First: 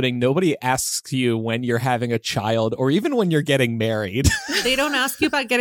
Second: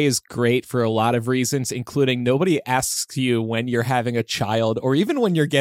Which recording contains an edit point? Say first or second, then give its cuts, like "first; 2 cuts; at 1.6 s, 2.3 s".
first; 1 cut; at 4.5 s